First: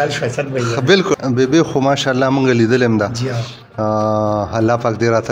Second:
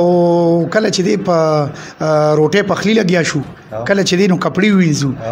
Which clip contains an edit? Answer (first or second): first